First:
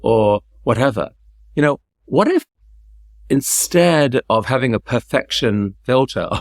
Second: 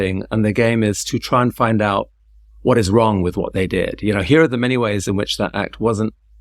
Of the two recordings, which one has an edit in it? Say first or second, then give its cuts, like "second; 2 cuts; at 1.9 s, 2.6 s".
first; 1 cut; at 4.8 s